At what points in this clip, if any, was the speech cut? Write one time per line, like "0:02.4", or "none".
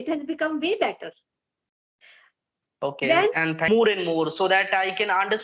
0:03.7